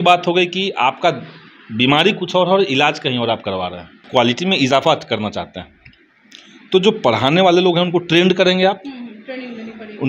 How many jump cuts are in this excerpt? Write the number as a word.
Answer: one